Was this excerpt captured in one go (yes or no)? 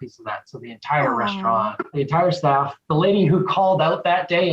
no